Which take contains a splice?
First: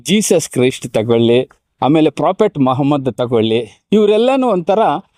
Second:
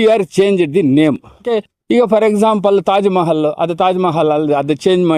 second; 1 cut; at 1.4 s

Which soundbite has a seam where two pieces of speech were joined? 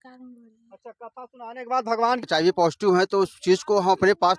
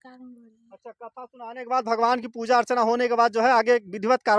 first; 1 cut; at 2.3 s

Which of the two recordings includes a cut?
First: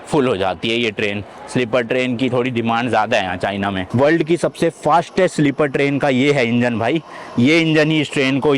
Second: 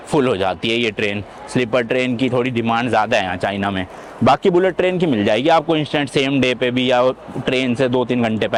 first; 1 cut; at 3.8 s

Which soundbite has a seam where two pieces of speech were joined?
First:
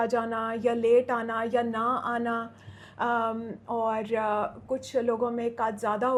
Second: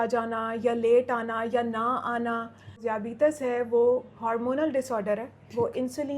second; 1 cut; at 2.8 s

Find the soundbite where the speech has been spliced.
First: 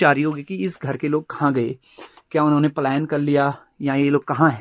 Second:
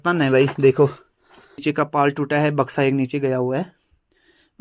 second; 1 cut; at 1.6 s

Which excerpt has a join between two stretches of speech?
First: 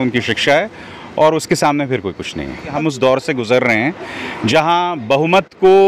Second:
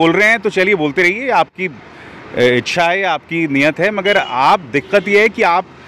first; 1 cut; at 2.7 s

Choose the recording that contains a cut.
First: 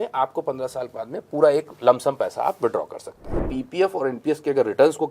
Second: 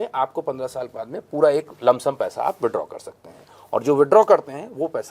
first; 1 cut; at 3.5 s

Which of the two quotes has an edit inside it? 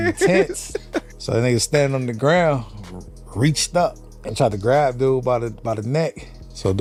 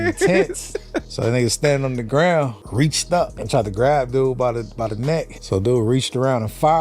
second; 3 cuts; at 1.1 s, 3.2 s, 5.4 s

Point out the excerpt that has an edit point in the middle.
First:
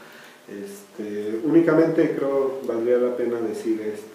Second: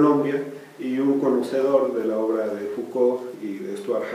first; 1 cut; at 1.8 s

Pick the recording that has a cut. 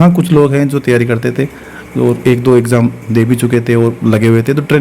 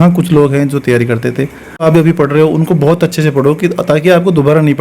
second; 1 cut; at 1.8 s

